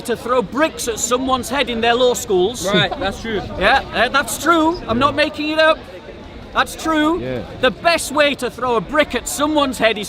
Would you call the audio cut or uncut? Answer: uncut